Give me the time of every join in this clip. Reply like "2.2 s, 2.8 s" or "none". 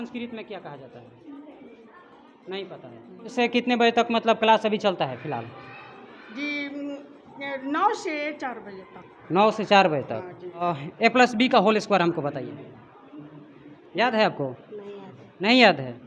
3.3 s, 10.6 s